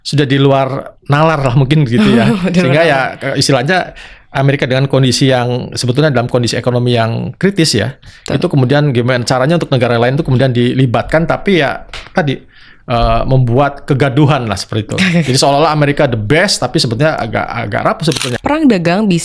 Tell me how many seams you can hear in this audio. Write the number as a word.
one